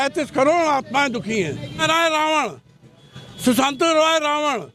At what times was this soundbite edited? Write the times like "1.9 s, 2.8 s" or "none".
1.8 s